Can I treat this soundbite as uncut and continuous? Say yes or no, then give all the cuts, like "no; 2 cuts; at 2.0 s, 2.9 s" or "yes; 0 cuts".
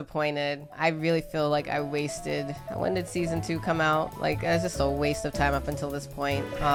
yes; 0 cuts